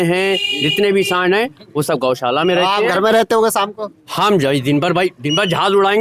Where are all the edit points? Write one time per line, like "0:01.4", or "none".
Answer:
none